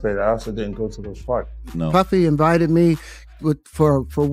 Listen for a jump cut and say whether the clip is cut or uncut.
cut